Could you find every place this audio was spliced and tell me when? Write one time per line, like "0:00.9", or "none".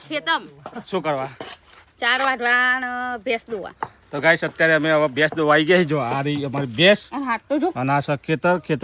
none